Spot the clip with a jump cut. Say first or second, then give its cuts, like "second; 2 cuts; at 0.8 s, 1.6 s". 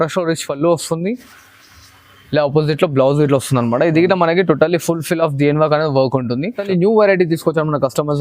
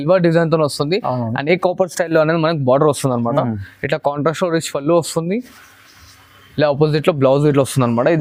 first; 1 cut; at 6.6 s